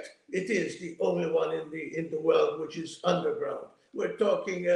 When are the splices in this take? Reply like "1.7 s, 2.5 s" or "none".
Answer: 3.8 s